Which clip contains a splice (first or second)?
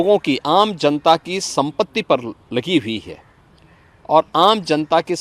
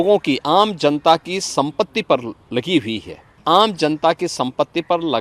second